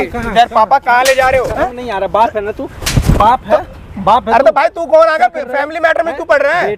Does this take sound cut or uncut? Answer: uncut